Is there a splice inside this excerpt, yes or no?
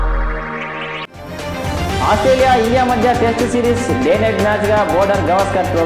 yes